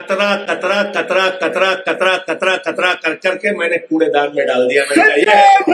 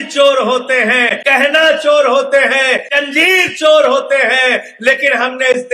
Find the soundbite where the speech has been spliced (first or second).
second